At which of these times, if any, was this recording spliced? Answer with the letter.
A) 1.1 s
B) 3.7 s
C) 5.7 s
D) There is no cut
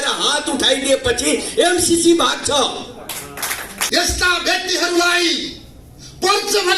B